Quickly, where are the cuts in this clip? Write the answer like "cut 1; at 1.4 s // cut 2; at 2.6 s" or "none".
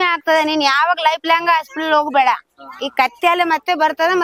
none